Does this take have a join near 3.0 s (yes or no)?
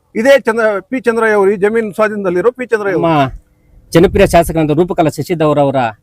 yes